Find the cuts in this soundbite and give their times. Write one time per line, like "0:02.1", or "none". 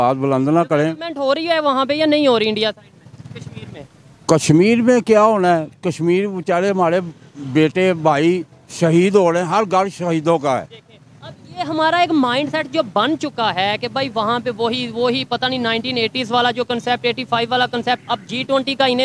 none